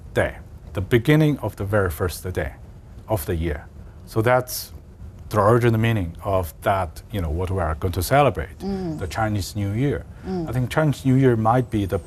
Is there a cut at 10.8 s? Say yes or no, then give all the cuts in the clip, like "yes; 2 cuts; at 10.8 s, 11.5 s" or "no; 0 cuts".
no; 0 cuts